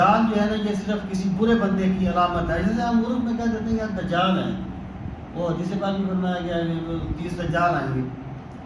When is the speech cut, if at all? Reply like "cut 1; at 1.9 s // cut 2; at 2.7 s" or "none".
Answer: none